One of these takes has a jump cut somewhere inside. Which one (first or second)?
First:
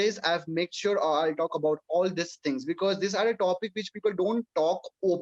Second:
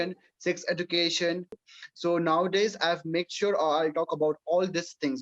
second